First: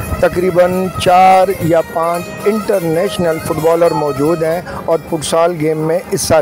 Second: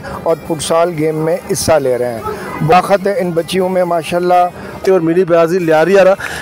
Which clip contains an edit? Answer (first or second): second